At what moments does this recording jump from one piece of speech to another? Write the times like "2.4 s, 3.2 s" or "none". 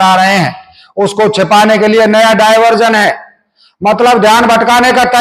none

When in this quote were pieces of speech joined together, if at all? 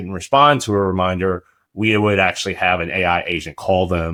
none

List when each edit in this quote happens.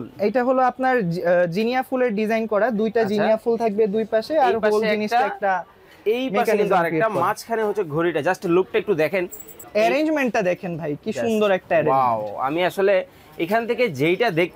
9.6 s

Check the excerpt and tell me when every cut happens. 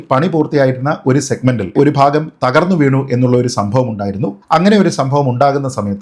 1.7 s

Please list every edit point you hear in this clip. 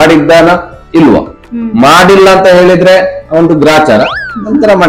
none

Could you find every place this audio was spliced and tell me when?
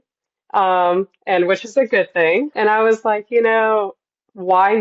2.5 s

